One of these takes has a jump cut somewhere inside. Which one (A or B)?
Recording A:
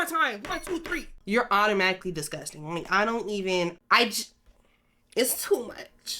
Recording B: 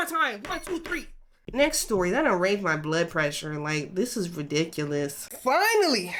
A